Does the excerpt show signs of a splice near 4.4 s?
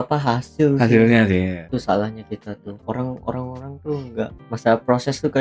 yes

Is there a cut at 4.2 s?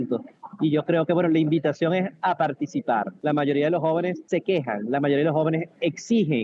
yes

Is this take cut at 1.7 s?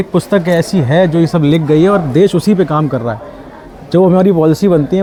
no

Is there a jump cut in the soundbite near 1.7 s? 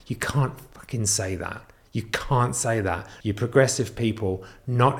no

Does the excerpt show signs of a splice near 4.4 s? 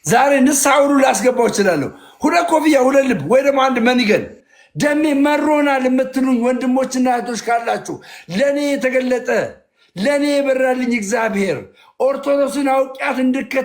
yes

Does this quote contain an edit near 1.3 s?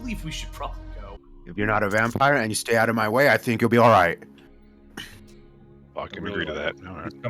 yes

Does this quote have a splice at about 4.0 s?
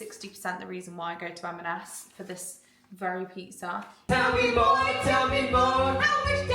yes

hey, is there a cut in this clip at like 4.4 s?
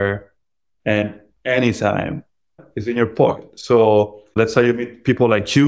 yes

